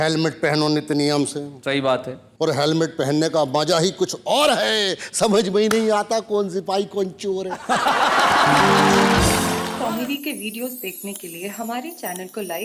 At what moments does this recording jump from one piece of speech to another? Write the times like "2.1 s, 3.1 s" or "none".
9.6 s

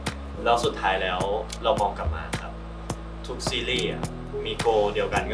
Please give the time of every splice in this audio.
none

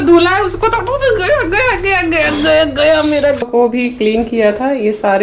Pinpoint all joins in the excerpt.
3.4 s

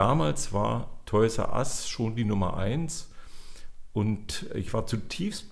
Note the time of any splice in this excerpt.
none

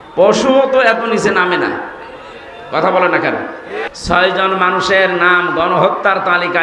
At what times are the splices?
3.9 s

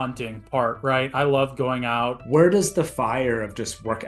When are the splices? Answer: 2.2 s

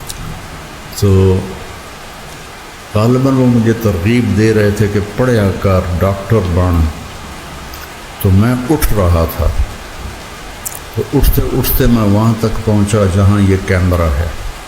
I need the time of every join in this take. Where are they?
9.5 s, 11.0 s

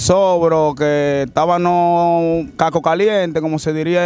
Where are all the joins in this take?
2.5 s

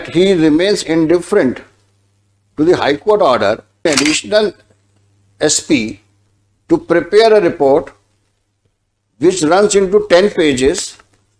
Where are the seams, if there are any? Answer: 3.8 s

